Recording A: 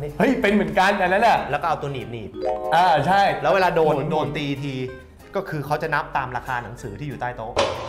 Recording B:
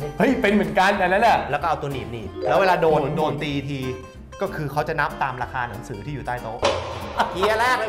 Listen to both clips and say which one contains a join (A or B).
B